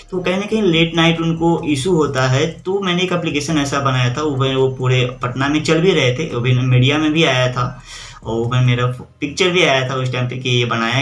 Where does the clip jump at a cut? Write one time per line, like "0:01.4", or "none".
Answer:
none